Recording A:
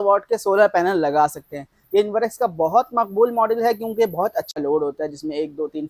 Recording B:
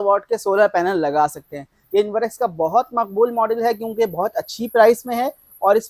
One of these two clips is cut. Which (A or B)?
A